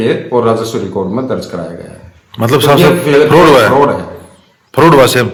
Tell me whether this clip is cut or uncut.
uncut